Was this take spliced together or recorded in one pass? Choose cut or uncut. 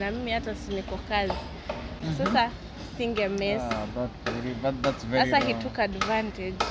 cut